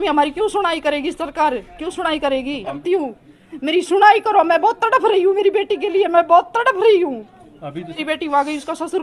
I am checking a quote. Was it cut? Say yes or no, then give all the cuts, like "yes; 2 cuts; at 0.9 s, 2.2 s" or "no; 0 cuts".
yes; 2 cuts; at 2.8 s, 8.0 s